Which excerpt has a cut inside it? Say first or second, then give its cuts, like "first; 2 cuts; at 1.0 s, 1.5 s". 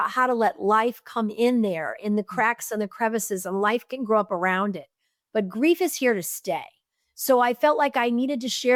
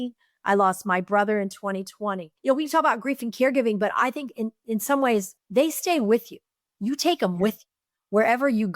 second; 2 cuts; at 2.3 s, 5.3 s